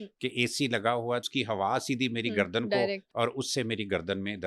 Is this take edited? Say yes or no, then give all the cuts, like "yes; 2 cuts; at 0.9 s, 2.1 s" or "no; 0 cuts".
yes; 2 cuts; at 1.3 s, 3.0 s